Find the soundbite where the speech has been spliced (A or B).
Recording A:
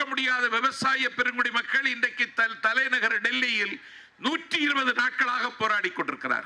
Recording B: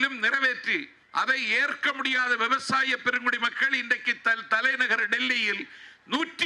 B